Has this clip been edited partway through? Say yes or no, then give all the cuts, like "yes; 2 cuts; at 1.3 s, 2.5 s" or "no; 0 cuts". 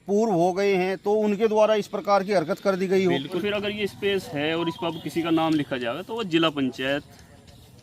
yes; 1 cut; at 3.4 s